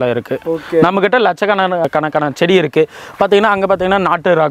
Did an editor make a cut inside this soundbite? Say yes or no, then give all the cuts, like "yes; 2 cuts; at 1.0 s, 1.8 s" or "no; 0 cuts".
no; 0 cuts